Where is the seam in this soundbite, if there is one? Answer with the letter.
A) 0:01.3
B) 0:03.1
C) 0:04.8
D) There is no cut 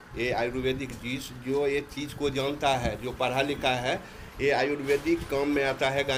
D